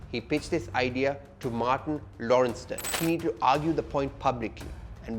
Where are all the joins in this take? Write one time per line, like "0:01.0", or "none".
0:02.9